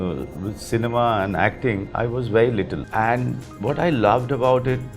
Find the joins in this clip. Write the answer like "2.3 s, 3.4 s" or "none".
2.8 s